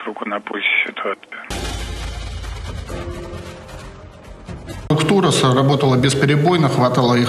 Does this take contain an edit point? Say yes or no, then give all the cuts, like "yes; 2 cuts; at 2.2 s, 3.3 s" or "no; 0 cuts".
no; 0 cuts